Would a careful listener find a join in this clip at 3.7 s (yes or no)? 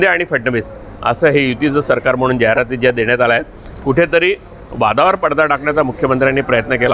no